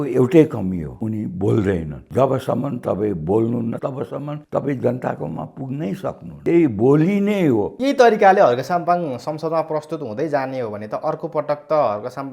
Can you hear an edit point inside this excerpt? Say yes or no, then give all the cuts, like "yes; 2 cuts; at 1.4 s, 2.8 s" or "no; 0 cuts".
yes; 5 cuts; at 0.9 s, 2.0 s, 3.8 s, 6.3 s, 7.7 s